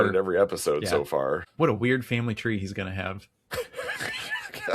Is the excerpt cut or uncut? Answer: cut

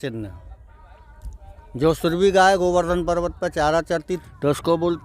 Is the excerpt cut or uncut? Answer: cut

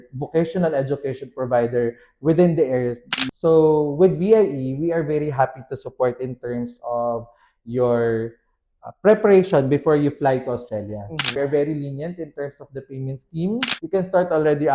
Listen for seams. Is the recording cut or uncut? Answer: cut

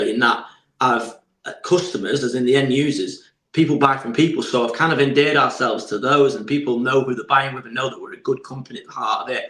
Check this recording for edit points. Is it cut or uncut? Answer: uncut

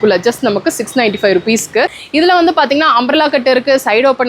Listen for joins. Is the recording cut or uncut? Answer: cut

